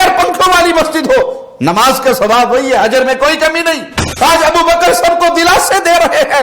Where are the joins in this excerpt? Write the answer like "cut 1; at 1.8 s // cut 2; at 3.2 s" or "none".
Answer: cut 1; at 4.1 s